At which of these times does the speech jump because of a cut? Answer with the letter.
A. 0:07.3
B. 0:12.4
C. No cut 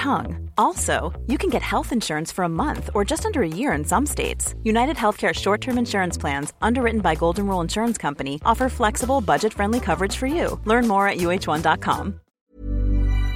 B